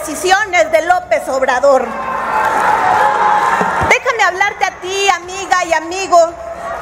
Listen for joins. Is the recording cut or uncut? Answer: uncut